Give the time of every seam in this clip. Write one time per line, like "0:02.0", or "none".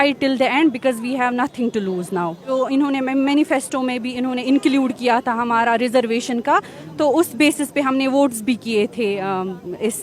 0:02.4